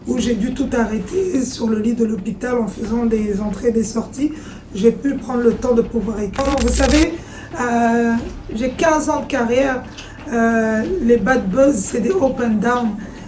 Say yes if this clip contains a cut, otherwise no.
yes